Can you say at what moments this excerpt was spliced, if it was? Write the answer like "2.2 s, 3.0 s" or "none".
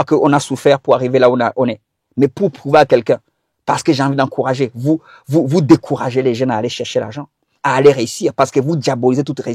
none